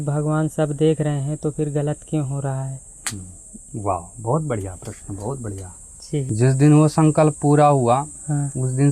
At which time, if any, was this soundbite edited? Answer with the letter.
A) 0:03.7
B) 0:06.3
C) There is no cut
B